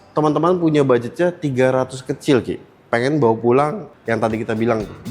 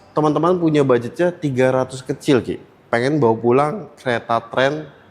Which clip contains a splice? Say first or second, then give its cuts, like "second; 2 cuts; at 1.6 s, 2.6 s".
first; 1 cut; at 3.9 s